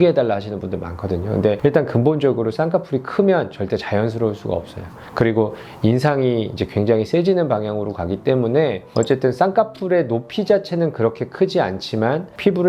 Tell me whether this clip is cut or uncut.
uncut